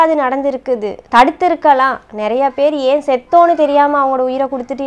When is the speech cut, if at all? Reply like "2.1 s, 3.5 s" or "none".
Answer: 1.0 s